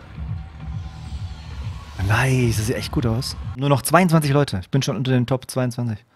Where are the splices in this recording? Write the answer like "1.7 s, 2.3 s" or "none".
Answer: 3.6 s